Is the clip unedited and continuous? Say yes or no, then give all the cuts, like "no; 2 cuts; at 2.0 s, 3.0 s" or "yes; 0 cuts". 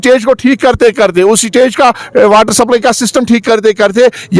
yes; 0 cuts